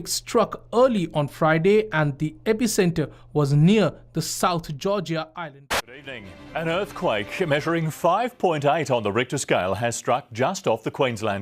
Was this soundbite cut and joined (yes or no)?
yes